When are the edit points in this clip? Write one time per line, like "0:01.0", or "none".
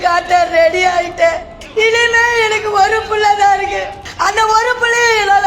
0:01.5
0:04.0